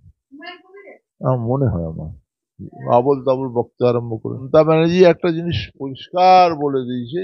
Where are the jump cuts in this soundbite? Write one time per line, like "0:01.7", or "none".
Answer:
0:04.4